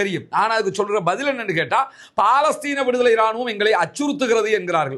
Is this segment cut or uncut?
uncut